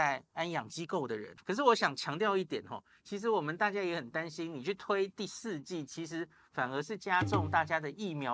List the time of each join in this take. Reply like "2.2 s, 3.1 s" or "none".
1.3 s